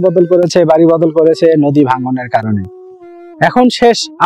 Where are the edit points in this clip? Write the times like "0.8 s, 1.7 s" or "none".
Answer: none